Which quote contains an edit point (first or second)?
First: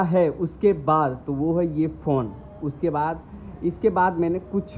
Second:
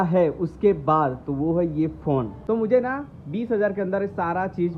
second